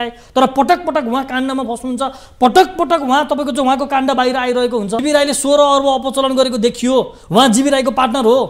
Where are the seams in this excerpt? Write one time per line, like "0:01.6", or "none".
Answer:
0:05.0